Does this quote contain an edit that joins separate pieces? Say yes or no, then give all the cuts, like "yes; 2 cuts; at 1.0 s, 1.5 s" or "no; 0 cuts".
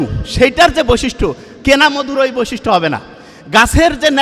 no; 0 cuts